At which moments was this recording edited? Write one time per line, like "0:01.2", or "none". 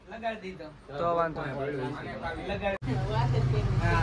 0:02.8